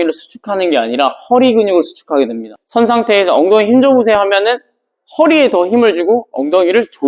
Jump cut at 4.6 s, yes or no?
no